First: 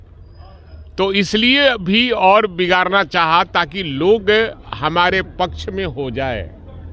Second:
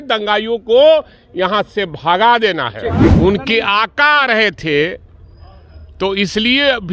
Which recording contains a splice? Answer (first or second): second